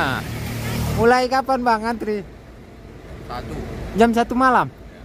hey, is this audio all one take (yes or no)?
no